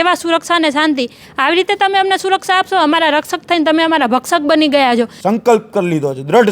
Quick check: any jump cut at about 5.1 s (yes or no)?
yes